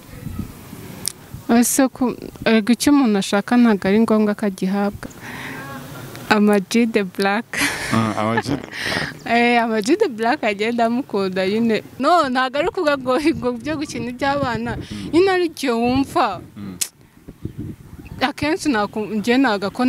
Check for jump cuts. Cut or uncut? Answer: cut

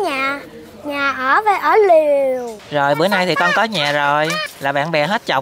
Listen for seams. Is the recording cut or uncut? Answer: cut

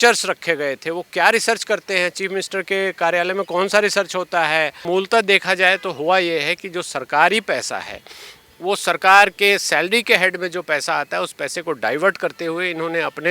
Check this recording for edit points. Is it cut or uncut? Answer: cut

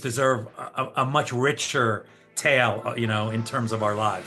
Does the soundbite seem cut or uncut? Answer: uncut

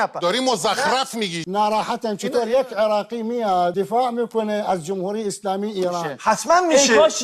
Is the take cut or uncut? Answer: cut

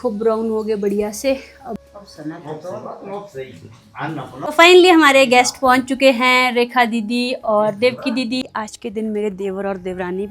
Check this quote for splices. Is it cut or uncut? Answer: cut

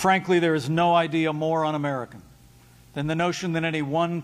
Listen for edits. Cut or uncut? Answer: cut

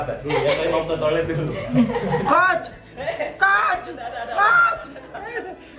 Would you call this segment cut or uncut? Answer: uncut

